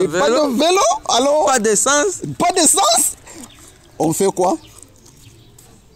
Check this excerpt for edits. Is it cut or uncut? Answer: uncut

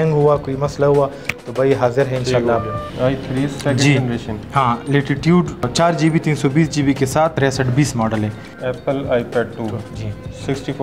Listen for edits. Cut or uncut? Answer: cut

